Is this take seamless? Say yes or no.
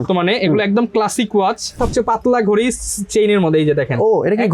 no